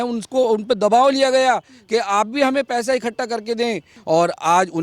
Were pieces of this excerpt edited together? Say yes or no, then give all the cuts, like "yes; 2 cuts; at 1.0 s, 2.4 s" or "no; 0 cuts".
yes; 1 cut; at 3.9 s